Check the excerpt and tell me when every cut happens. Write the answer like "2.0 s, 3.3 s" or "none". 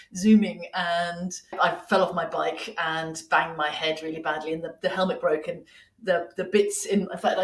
1.5 s